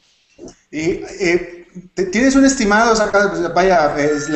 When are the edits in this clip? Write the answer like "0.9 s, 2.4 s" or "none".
2.1 s